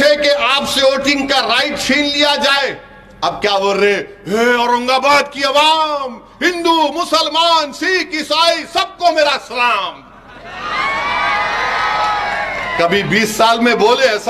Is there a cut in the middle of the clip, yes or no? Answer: no